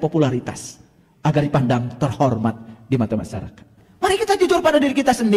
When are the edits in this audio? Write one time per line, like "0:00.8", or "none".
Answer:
0:03.8